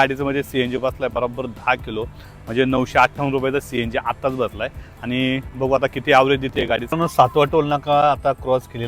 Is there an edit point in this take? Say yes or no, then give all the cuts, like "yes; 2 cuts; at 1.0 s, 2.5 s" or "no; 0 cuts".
yes; 1 cut; at 6.8 s